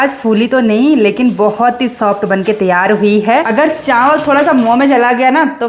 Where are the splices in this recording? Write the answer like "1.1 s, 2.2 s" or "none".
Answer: 3.5 s